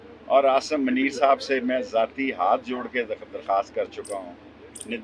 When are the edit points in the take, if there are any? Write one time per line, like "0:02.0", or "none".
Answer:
none